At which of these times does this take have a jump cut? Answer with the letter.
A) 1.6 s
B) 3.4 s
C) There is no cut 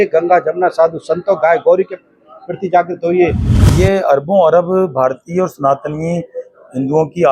B